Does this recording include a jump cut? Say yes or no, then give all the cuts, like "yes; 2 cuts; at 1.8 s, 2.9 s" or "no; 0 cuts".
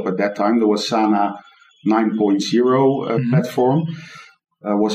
no; 0 cuts